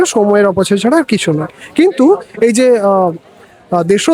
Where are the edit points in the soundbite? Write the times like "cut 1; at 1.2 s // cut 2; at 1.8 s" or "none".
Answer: none